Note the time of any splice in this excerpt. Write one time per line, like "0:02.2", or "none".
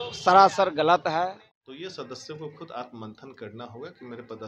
0:01.0

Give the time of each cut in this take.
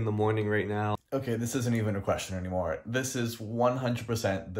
0:01.0

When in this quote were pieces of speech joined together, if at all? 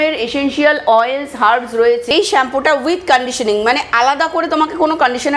0:02.1

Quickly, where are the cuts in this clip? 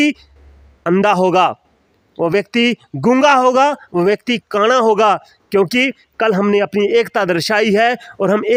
none

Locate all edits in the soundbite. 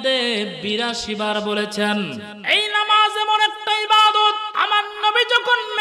0:02.3
0:04.5

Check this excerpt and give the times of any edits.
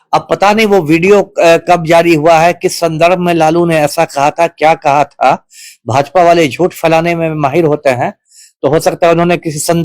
none

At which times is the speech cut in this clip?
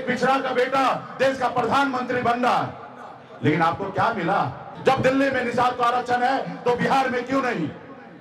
0:04.6

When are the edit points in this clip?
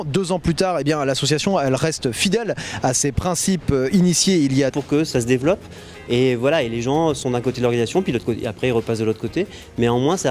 none

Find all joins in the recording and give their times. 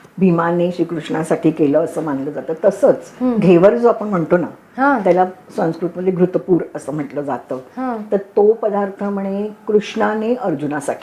none

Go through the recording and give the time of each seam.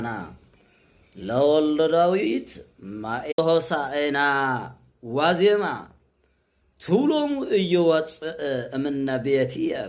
0:03.3

